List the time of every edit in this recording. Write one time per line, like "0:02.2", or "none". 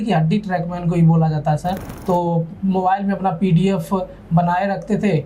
0:01.8